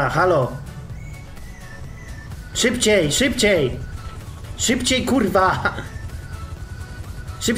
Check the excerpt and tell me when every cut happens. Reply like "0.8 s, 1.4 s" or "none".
none